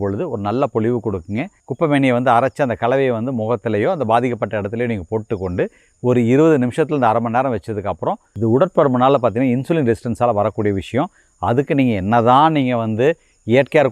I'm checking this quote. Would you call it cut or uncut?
cut